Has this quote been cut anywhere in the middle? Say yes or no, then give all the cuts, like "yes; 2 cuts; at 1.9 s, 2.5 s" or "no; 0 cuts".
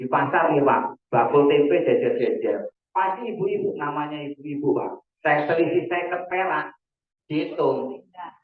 no; 0 cuts